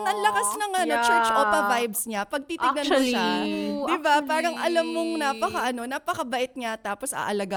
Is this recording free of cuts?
yes; 0 cuts

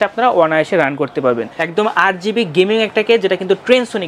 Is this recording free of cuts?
no; 1 cut; at 1.5 s

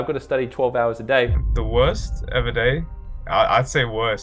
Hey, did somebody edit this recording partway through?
yes; 1 cut; at 1.4 s

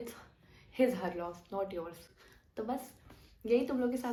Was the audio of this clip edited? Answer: no; 0 cuts

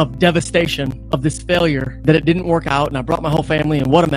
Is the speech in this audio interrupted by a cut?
yes; 1 cut; at 1.9 s

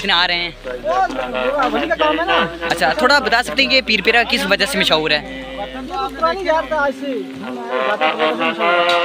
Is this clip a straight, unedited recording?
yes; 0 cuts

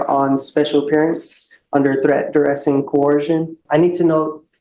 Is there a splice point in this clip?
yes; 1 cut; at 3.6 s

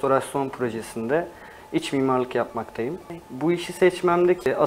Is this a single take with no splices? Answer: no; 1 cut; at 3.2 s

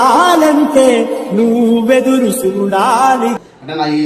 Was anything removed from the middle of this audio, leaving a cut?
no; 0 cuts

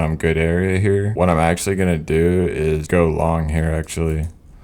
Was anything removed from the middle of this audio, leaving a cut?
yes; 2 cuts; at 1.1 s, 2.8 s

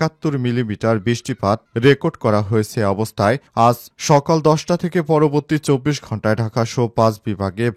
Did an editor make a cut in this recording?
no; 0 cuts

